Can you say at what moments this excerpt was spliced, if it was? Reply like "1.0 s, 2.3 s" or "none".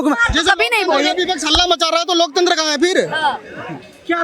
none